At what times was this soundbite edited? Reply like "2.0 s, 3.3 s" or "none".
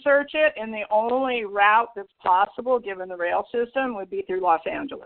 none